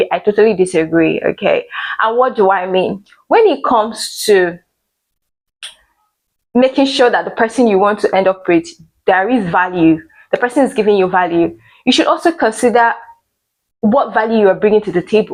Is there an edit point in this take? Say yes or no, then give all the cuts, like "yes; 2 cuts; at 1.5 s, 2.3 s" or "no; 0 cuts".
no; 0 cuts